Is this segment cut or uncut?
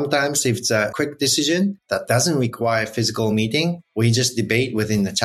cut